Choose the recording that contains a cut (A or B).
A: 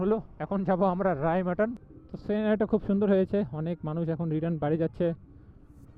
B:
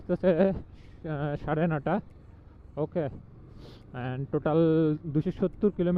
A